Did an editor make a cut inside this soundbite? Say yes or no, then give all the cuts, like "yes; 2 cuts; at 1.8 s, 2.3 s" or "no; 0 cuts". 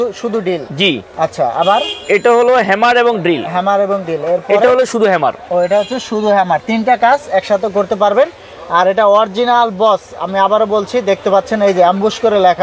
no; 0 cuts